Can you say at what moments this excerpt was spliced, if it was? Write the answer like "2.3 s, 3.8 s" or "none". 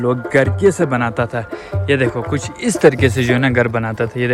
none

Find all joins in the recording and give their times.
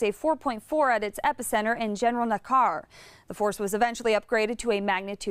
none

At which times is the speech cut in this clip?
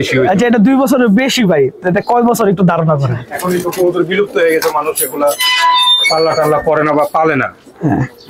3.3 s

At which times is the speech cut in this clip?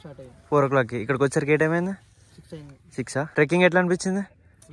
3.3 s

